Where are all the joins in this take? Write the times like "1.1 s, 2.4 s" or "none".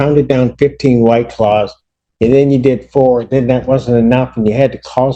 none